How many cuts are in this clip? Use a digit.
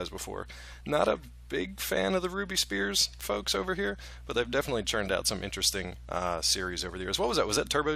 0